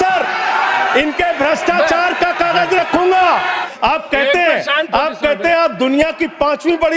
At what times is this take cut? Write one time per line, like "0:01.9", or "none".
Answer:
0:03.6

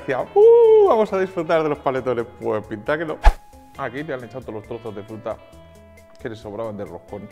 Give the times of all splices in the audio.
0:03.3

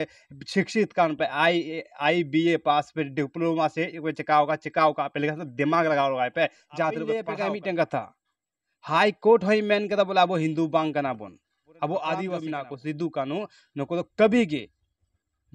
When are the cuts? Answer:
0:07.2
0:12.4

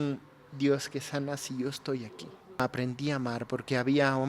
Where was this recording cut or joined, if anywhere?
0:02.6

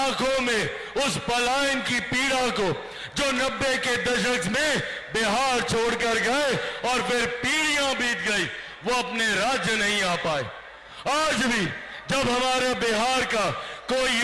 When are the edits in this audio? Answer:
none

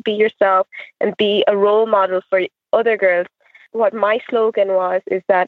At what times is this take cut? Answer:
0:03.6

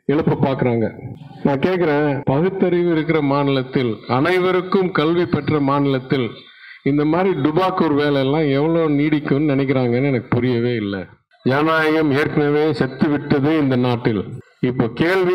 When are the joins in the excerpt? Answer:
0:14.4

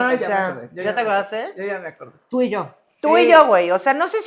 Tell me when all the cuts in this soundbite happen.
none

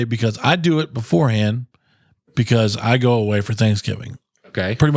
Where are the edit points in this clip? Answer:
none

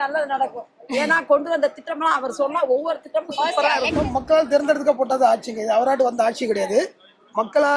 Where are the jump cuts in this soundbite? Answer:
0:03.9

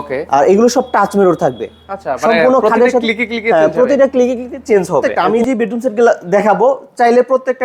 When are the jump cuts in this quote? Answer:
0:05.2

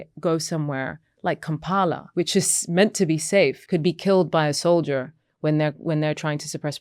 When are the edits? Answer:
0:02.0
0:03.6

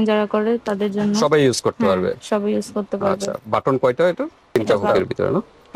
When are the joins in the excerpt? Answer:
0:04.8

